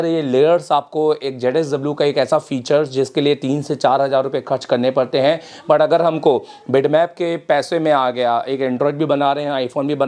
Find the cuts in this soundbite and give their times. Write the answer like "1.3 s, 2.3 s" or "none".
none